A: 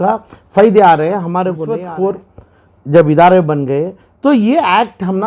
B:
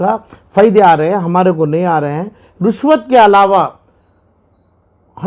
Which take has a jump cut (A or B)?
A